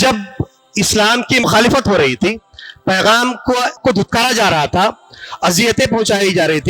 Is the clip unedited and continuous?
no; 2 cuts; at 1.4 s, 3.8 s

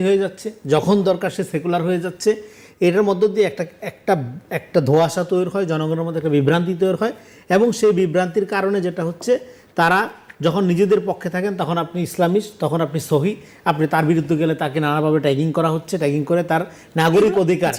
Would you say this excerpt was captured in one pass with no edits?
yes; 0 cuts

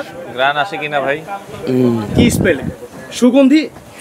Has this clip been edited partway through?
no; 0 cuts

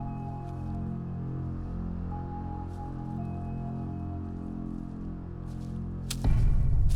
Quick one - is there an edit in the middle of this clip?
no; 0 cuts

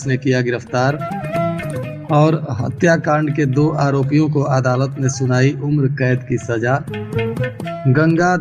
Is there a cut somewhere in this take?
no; 0 cuts

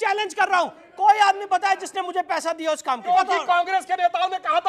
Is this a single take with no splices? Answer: no; 1 cut; at 3.1 s

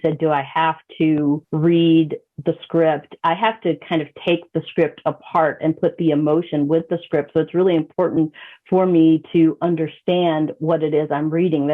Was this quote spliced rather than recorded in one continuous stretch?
yes; 1 cut; at 1.5 s

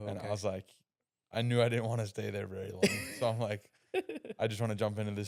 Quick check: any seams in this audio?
no; 0 cuts

